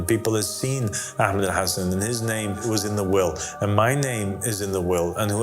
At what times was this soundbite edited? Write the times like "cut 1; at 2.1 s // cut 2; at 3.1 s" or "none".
cut 1; at 2.6 s